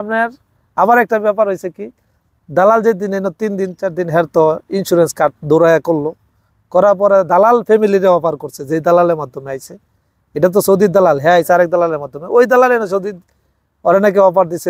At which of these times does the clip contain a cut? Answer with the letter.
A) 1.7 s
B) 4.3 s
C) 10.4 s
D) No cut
D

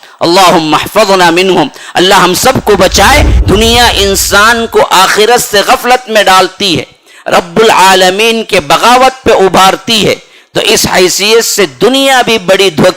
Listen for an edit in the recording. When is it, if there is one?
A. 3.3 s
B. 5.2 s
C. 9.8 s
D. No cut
A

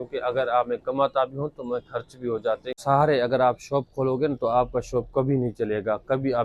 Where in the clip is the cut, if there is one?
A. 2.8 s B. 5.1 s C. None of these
A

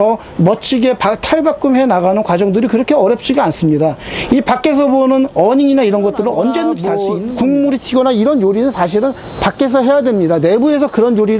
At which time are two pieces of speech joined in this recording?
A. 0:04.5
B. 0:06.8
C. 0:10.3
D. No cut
B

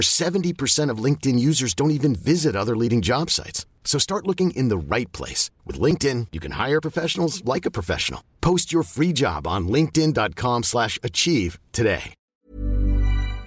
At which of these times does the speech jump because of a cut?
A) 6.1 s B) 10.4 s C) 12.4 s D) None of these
C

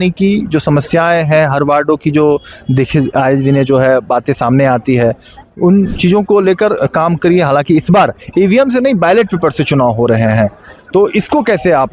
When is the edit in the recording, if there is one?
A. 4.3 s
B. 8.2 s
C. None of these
C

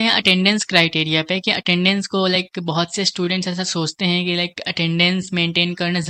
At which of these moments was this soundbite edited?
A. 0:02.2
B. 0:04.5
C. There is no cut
C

